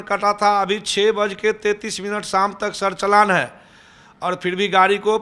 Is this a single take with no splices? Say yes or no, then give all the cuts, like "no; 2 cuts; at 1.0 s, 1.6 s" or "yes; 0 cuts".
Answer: yes; 0 cuts